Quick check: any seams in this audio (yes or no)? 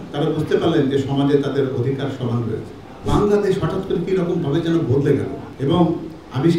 yes